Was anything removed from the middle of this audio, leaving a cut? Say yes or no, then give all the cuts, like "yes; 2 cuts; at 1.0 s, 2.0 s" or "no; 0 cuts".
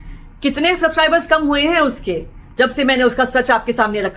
no; 0 cuts